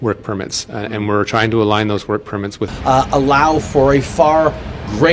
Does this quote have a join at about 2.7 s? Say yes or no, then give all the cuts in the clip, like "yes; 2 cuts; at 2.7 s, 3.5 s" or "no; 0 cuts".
yes; 1 cut; at 2.7 s